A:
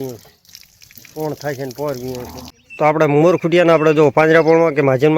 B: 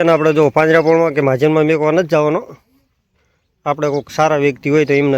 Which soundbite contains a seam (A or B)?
A